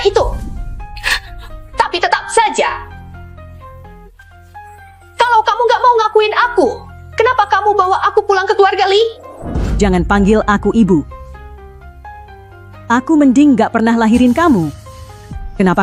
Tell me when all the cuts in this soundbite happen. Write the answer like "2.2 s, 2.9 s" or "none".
2.9 s, 4.8 s